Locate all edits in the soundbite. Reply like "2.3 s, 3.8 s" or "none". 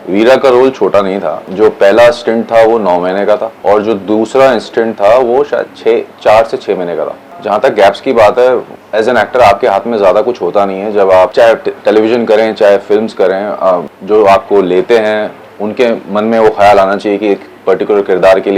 none